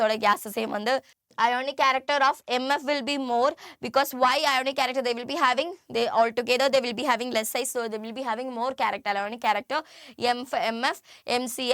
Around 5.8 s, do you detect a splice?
no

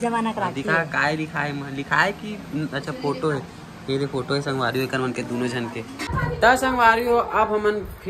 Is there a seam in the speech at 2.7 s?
no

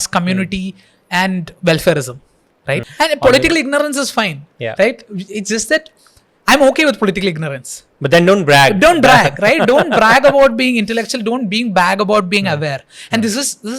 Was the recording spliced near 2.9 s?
yes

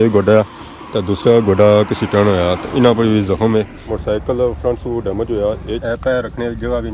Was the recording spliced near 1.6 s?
no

